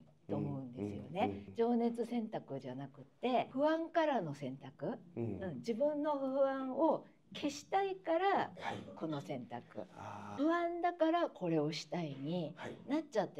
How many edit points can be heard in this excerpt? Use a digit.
1